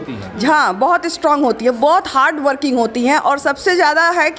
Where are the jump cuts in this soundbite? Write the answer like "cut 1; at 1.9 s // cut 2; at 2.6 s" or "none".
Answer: none